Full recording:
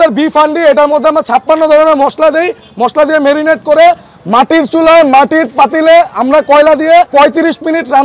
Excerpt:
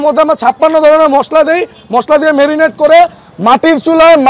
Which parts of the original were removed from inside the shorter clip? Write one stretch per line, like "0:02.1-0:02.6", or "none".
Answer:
none